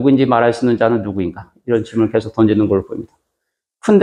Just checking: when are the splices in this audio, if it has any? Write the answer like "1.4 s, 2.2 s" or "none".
none